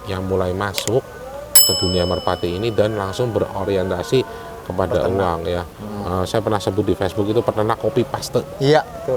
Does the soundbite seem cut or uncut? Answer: uncut